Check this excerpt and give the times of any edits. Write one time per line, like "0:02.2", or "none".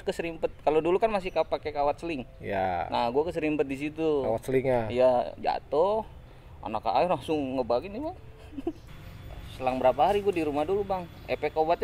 0:08.9